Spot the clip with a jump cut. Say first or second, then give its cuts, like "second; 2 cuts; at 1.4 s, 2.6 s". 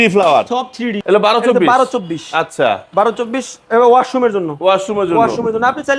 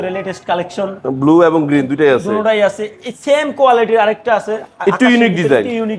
first; 1 cut; at 1.0 s